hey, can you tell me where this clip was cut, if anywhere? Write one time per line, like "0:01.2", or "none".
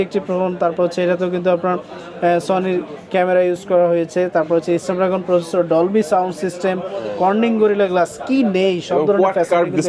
none